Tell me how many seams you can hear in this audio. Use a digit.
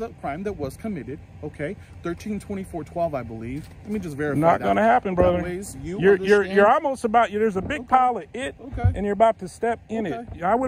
0